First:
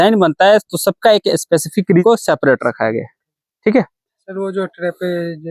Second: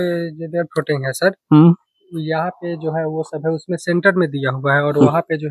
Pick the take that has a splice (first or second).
first